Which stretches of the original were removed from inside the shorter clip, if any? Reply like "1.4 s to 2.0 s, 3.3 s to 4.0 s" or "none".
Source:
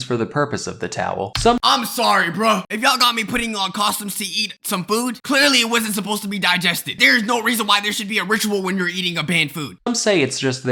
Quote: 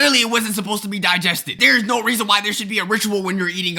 none

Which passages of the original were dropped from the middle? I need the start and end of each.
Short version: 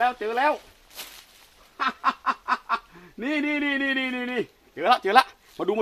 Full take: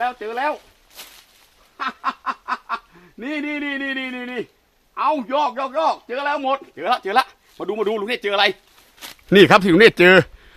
4.7 s to 6.7 s

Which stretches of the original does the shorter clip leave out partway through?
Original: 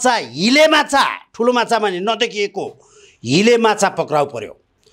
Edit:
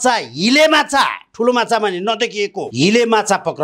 2.6 s to 3.1 s

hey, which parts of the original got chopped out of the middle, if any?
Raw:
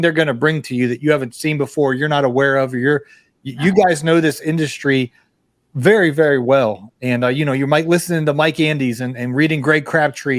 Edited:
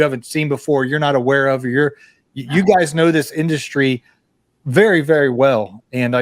none

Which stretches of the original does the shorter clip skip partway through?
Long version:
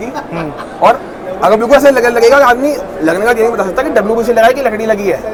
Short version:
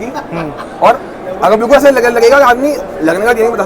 none

